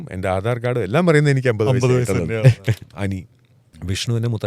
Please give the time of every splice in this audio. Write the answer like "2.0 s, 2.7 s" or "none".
2.8 s